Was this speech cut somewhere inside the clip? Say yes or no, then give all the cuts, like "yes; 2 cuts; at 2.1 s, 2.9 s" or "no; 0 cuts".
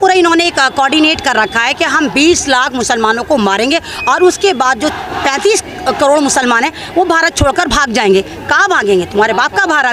no; 0 cuts